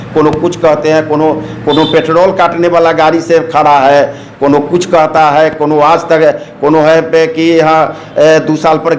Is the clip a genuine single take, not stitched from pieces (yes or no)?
yes